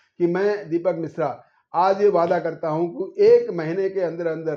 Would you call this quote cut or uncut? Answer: uncut